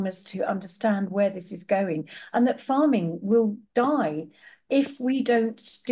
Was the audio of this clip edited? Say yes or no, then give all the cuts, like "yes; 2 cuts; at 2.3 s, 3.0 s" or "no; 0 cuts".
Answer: no; 0 cuts